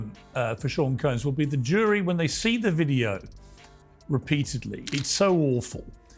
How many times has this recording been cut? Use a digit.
1